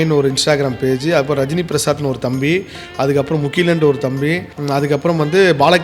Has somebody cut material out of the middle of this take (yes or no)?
yes